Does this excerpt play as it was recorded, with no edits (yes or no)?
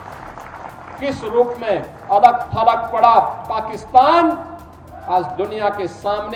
yes